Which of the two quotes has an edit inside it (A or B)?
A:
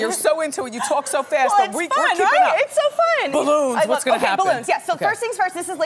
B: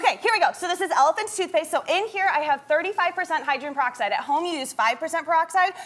B